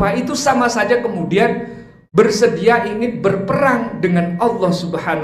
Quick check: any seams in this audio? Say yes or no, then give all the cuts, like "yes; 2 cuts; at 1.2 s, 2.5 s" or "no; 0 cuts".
no; 0 cuts